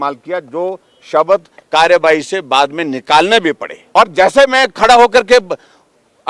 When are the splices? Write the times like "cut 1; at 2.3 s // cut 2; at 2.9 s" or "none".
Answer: cut 1; at 3.7 s